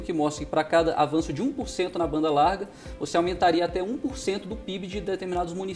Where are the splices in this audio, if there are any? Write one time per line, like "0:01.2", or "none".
none